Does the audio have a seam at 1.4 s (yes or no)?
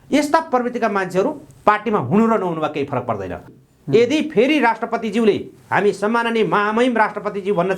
no